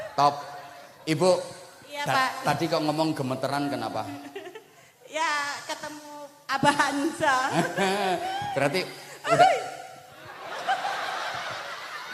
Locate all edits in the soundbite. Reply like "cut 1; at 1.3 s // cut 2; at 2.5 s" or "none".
none